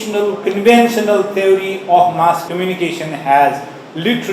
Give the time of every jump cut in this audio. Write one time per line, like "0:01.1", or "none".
0:02.4